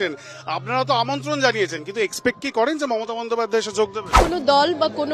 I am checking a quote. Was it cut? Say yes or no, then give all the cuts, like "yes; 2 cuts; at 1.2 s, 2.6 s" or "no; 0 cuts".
yes; 1 cut; at 4.2 s